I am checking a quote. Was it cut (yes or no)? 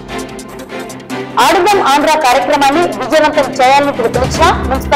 yes